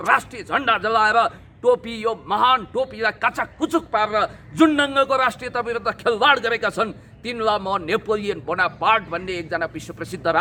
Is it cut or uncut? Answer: uncut